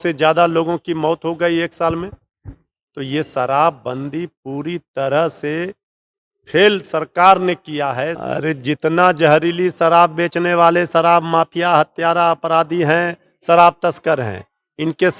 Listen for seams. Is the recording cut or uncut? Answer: cut